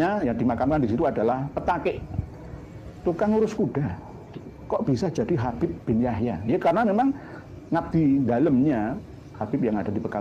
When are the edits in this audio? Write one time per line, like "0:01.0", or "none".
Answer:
none